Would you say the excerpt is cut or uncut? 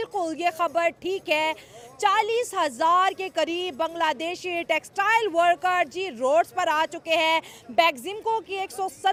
uncut